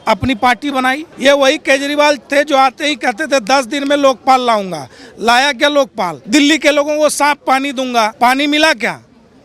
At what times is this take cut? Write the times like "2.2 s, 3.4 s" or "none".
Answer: 1.1 s, 6.1 s, 8.1 s